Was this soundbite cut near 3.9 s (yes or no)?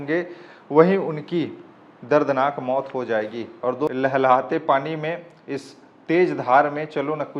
yes